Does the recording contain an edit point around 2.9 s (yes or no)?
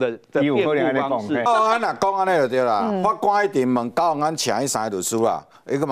no